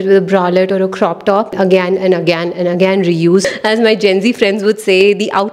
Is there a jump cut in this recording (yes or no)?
yes